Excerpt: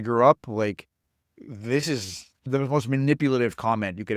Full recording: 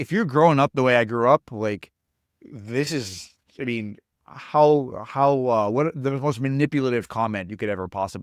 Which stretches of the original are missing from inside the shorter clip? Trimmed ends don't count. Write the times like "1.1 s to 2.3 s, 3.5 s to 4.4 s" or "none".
3.5 s to 6.0 s